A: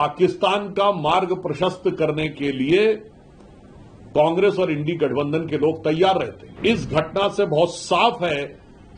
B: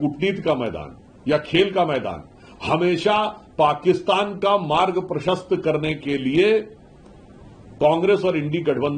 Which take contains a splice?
A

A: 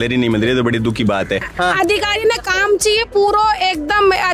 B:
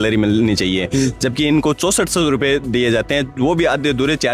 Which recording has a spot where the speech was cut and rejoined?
A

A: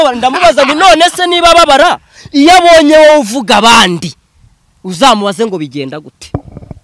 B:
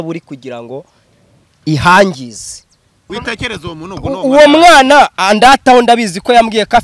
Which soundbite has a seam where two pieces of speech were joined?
B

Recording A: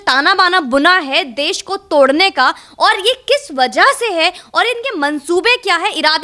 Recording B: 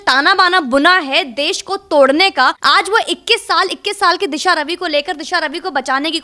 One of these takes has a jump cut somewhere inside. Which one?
B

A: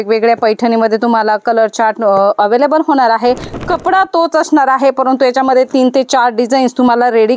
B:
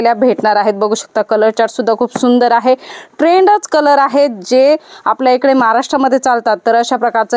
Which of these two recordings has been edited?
A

